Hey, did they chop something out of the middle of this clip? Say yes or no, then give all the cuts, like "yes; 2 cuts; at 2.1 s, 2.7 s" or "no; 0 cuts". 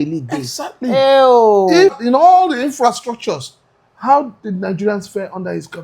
yes; 1 cut; at 2.0 s